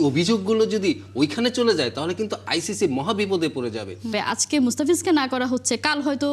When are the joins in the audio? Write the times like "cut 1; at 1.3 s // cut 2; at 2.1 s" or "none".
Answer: cut 1; at 4.1 s